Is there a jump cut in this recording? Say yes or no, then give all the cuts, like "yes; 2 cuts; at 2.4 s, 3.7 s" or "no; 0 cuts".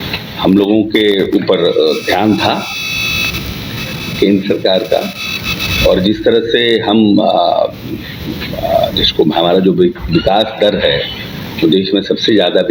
no; 0 cuts